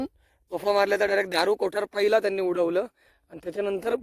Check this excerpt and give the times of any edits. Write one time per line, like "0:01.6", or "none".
none